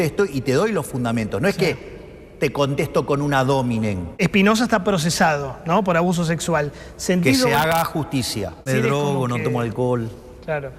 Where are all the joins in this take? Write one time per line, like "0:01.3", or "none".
0:04.2
0:08.7